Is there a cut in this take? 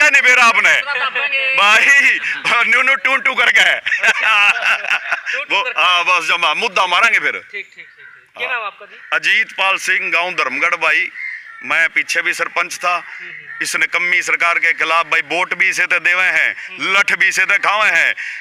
no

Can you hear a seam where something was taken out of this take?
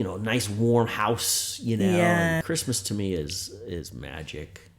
yes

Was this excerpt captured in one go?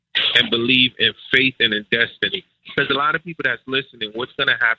yes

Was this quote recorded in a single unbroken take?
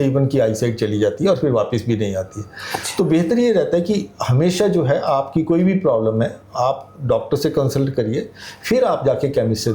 yes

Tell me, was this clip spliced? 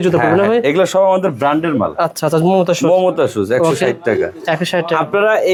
no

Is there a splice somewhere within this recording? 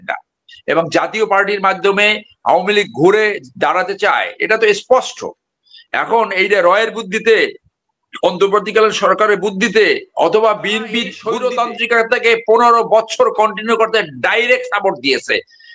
yes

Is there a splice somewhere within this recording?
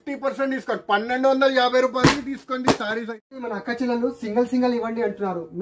yes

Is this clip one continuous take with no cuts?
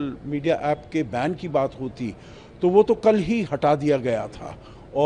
yes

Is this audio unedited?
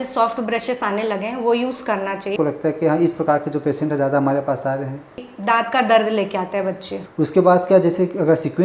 no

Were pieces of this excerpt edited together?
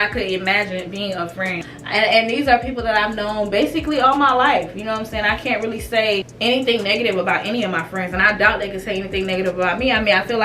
yes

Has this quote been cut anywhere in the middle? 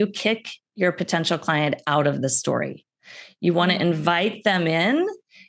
no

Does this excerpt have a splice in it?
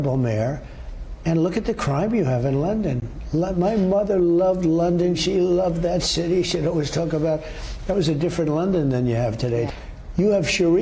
yes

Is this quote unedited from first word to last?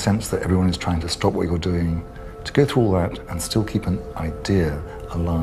yes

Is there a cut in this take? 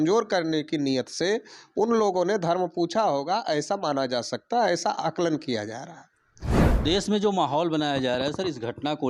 yes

